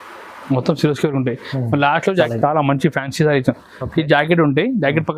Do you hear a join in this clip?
yes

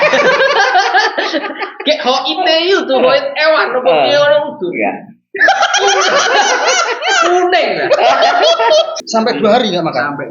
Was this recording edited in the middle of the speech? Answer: yes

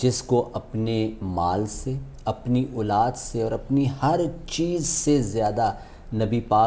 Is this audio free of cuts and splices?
yes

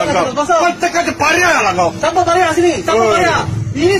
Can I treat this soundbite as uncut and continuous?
yes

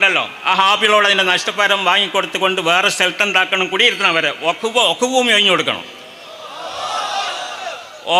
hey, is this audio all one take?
yes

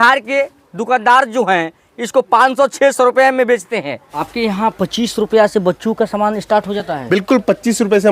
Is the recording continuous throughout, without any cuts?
no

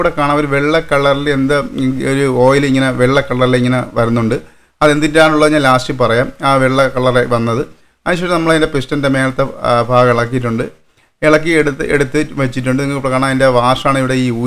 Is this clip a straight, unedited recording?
yes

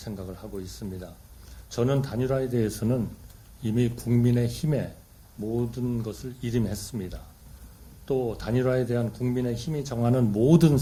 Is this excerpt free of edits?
yes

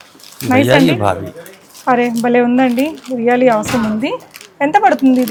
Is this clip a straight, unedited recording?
yes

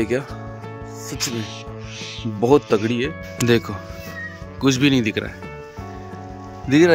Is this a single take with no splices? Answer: yes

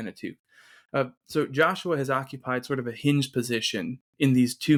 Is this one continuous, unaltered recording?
yes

